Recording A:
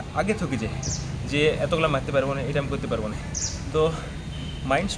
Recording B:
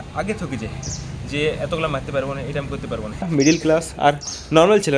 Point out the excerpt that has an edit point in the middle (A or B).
B